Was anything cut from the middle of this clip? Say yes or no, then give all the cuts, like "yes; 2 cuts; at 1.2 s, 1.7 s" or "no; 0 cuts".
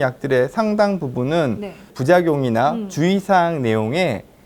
yes; 1 cut; at 1.9 s